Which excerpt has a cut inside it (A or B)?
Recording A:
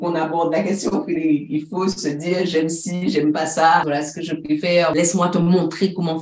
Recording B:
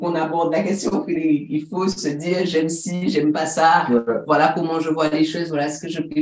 A